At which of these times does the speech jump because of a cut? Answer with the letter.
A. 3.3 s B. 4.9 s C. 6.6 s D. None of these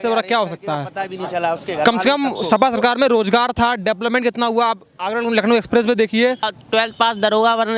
C